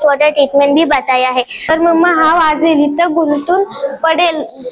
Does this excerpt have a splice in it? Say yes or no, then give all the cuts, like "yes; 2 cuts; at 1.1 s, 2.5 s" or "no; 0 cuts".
yes; 1 cut; at 1.7 s